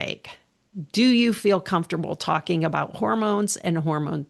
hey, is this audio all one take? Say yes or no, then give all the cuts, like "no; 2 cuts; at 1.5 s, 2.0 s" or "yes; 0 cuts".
yes; 0 cuts